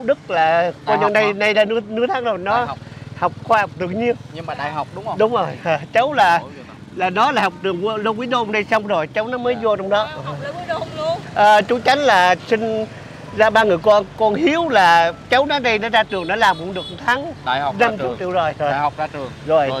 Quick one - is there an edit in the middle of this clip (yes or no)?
yes